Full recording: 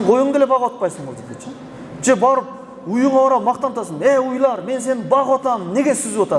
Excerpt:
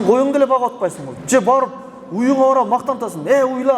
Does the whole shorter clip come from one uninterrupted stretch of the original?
no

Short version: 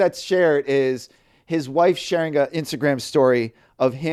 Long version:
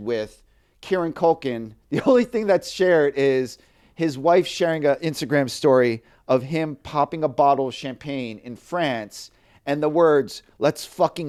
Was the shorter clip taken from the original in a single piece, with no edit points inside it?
yes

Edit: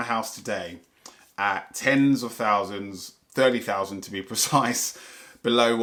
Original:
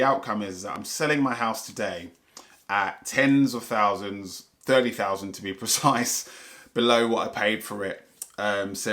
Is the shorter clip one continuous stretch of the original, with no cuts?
yes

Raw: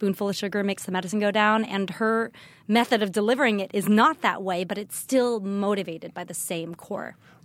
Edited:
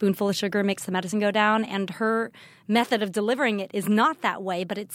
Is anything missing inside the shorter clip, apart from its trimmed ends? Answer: no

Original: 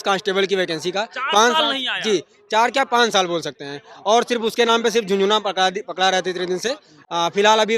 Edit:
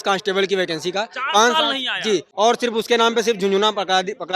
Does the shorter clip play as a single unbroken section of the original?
no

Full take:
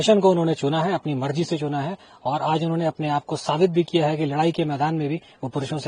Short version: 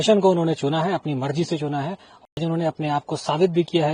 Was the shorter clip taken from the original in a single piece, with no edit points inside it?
no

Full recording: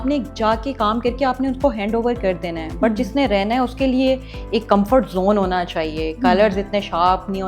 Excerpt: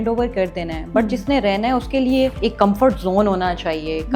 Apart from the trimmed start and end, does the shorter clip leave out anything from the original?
yes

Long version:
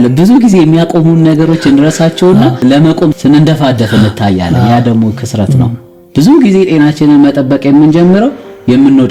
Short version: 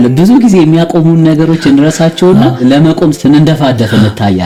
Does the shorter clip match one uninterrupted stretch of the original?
yes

